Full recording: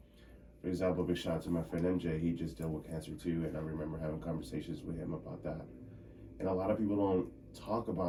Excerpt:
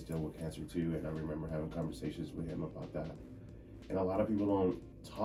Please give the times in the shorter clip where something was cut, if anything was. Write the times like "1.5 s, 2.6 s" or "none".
none